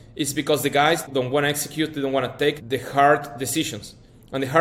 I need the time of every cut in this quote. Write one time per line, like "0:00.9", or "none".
0:01.0
0:02.6